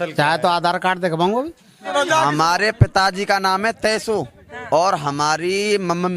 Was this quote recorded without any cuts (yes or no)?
no